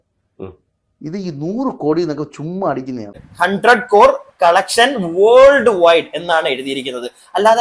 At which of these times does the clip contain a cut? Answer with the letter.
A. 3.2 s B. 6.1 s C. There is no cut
A